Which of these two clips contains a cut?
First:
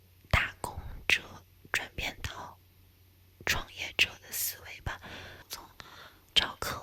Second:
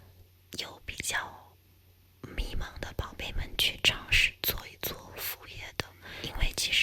first; 1 cut; at 5.4 s

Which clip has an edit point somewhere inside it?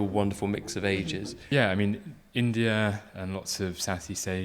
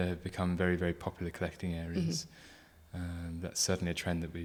first; 1 cut; at 1.4 s

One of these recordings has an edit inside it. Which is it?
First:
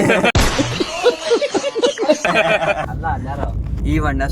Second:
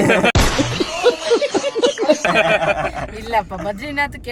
first; 1 cut; at 2.9 s

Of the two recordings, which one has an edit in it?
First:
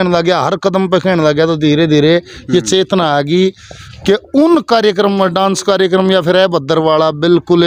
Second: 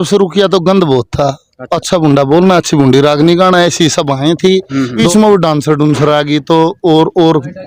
second; 2 cuts; at 1.7 s, 5.0 s

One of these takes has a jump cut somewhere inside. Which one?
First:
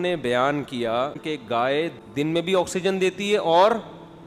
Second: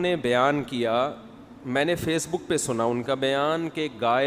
first; 2 cuts; at 1.2 s, 1.9 s

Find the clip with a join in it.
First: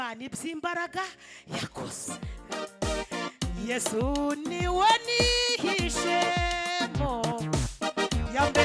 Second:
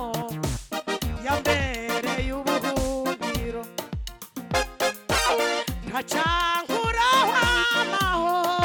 first; 1 cut; at 2.0 s

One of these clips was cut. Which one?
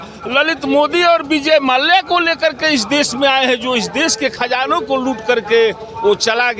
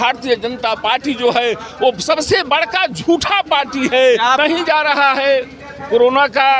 second; 1 cut; at 4.4 s

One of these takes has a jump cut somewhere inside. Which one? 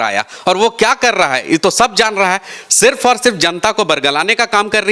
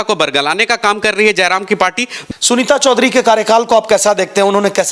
second; 1 cut; at 2.2 s

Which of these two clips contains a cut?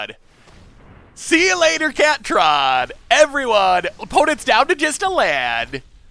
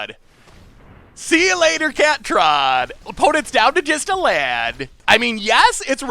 second; 2 cuts; at 3.0 s, 5.0 s

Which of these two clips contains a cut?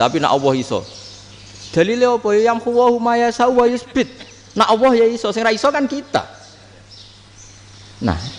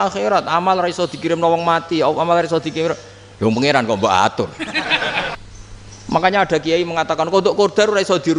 second; 1 cut; at 5.4 s

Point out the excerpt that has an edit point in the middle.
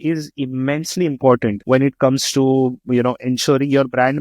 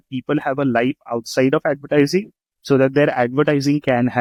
first; 1 cut; at 1.6 s

